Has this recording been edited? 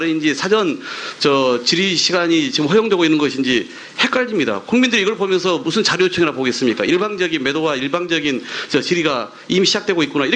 yes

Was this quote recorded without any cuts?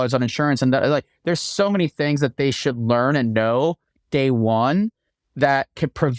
yes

